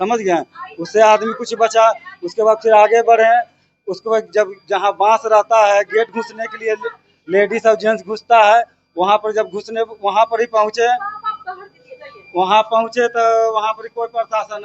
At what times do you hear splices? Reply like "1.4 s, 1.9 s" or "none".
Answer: none